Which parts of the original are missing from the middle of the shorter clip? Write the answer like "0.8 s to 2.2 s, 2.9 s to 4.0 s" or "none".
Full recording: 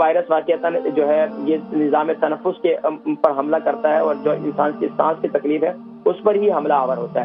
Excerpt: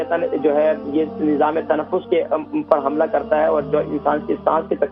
none